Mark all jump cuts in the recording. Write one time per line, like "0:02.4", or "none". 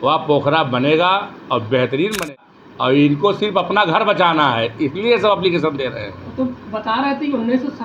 0:02.5